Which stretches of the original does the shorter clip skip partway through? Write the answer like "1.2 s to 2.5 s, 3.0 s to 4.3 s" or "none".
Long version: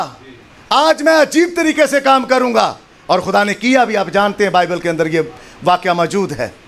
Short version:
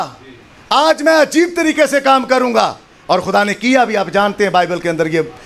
none